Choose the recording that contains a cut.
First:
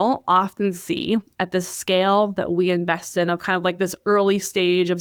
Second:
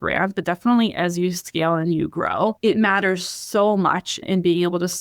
second; 2 cuts; at 2.6 s, 4.2 s

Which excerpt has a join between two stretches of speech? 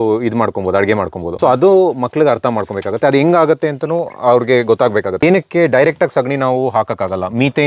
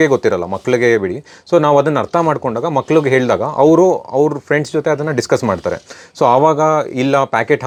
first; 2 cuts; at 1.2 s, 5.2 s

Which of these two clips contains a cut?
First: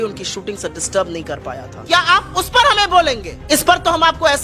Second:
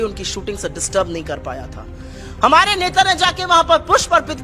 first; 2 cuts; at 1.8 s, 3.3 s

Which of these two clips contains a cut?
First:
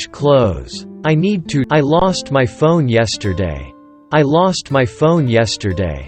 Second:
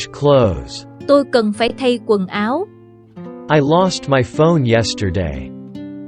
second; 2 cuts; at 1.0 s, 5.3 s

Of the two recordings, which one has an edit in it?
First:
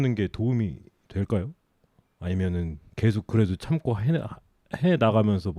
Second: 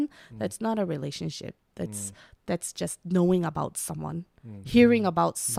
first; 1 cut; at 2.8 s

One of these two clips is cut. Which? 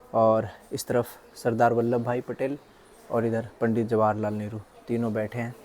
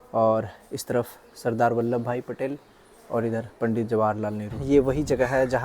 second; 1 cut; at 4.5 s

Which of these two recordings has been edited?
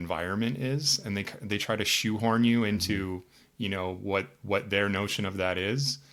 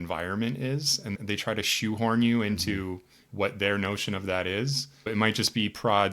second; 3 cuts; at 1.1 s, 3.2 s, 5.1 s

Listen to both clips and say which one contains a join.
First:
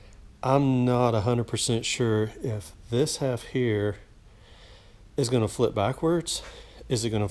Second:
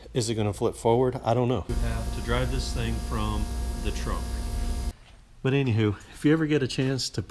second; 2 cuts; at 1.8 s, 4.9 s

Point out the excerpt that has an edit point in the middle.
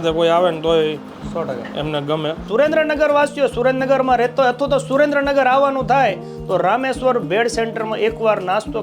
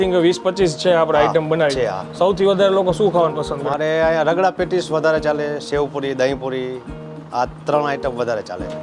first; 1 cut; at 2.5 s

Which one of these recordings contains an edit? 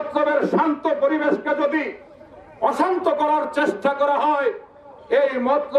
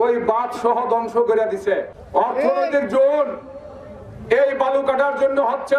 second; 1 cut; at 2.0 s

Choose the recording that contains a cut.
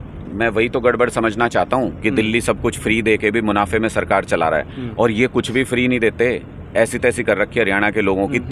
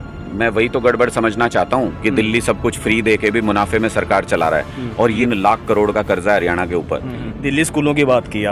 second; 2 cuts; at 5.2 s, 7.2 s

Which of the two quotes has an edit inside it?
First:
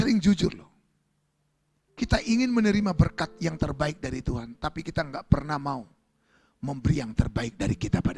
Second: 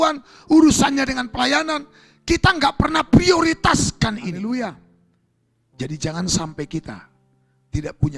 second; 1 cut; at 4.4 s

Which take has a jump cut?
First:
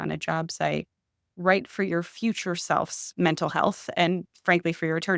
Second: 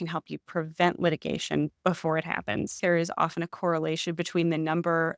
second; 1 cut; at 2.8 s

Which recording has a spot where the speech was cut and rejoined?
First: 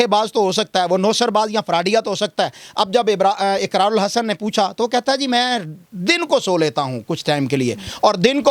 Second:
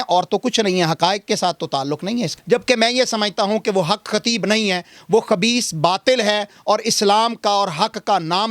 second; 1 cut; at 2.3 s

